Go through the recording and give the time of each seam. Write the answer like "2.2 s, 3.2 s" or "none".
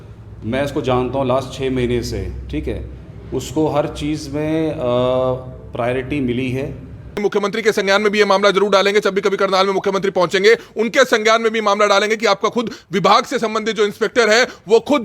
7.2 s